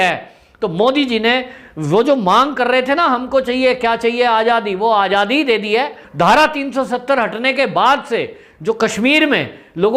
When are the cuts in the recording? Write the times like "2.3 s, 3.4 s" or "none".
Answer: 6.0 s

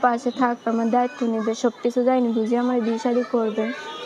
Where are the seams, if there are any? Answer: none

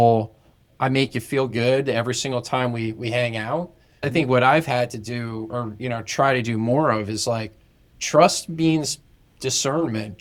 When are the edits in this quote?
none

